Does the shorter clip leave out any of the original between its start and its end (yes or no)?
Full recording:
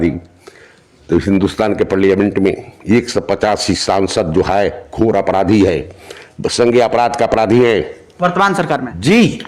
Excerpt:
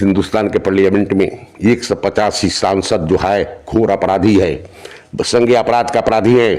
no